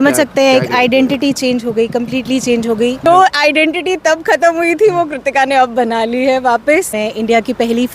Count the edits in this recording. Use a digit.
2